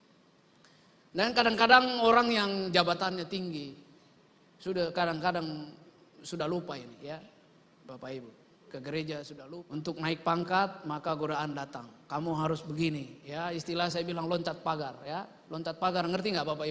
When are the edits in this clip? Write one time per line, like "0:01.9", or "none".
0:09.4